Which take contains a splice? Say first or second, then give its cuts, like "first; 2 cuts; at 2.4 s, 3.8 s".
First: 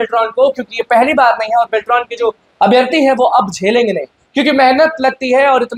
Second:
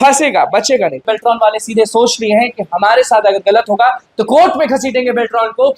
second; 1 cut; at 1.0 s